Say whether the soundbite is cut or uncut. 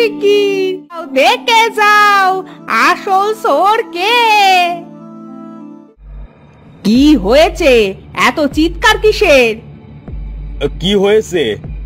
cut